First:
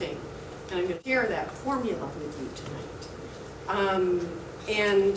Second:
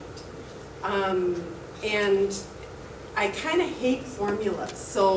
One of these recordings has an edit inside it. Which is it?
first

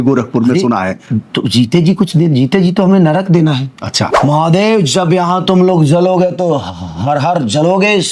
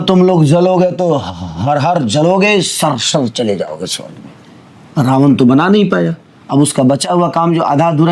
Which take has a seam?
first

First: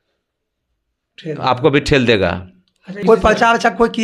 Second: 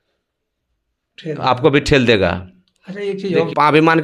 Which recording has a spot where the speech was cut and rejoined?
first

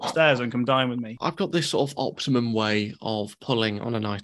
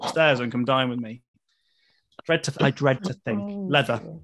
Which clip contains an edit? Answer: first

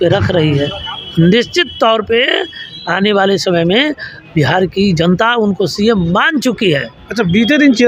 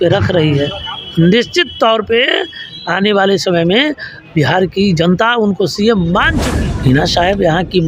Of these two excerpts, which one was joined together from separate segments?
second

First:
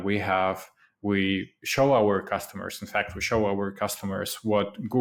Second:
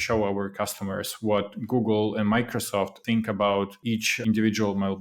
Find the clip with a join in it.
second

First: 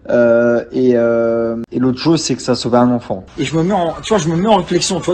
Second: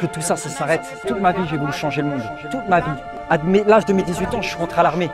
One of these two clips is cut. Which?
first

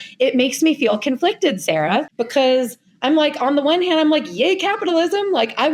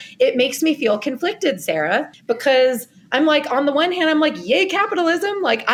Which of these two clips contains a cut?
first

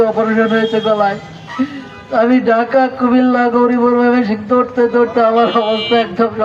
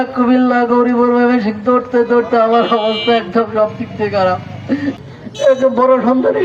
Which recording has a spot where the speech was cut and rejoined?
second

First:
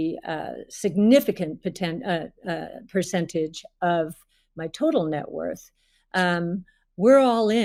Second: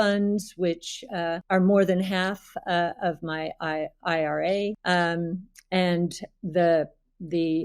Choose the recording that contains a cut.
second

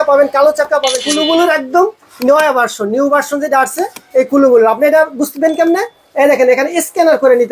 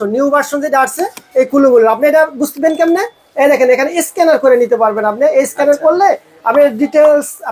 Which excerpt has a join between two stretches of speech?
first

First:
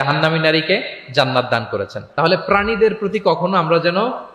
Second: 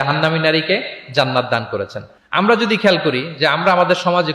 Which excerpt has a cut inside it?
first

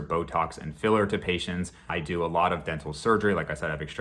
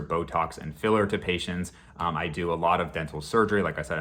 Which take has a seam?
first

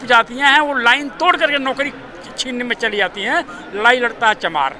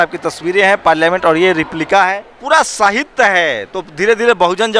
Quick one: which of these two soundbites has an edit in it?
second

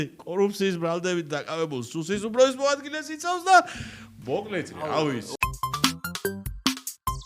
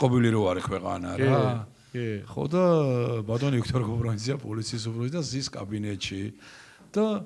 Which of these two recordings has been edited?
first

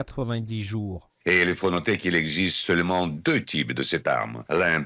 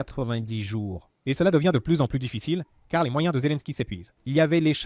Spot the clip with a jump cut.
first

